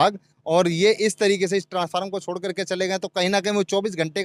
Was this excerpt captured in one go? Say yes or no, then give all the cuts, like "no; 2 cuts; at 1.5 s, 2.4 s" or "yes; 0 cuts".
yes; 0 cuts